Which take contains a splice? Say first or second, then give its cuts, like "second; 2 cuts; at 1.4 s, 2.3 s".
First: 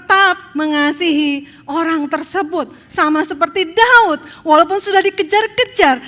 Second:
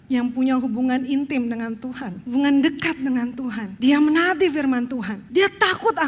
second; 3 cuts; at 2.1 s, 3.6 s, 5.2 s